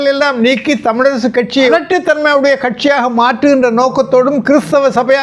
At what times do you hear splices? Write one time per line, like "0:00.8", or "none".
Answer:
0:01.7